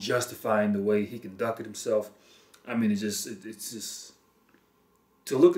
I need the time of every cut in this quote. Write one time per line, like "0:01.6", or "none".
none